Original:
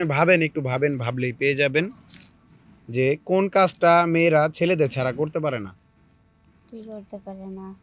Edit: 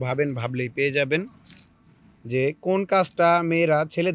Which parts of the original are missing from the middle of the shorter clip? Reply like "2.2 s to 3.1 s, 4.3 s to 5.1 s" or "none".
none